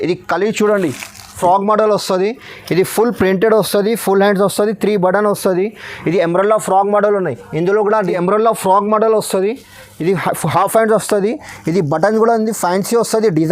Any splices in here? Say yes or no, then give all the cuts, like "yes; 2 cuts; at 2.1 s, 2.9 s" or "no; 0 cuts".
yes; 2 cuts; at 1.4 s, 8.0 s